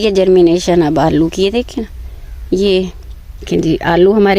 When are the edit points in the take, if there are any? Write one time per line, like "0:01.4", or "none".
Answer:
0:03.4